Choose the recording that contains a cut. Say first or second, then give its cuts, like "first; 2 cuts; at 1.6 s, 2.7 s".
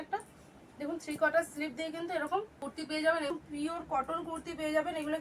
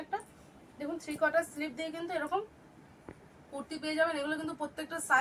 first; 2 cuts; at 2.5 s, 3.3 s